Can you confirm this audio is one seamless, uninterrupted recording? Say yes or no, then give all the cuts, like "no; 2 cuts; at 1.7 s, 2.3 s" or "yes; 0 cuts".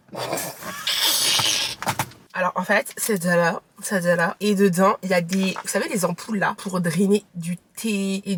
yes; 0 cuts